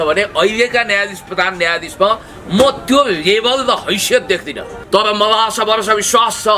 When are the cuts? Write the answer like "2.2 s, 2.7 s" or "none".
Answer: 4.7 s